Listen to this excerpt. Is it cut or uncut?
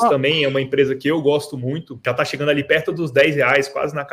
cut